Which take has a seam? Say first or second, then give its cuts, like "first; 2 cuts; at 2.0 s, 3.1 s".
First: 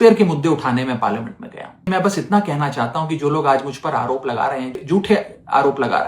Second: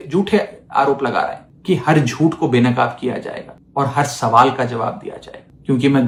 first; 1 cut; at 1.9 s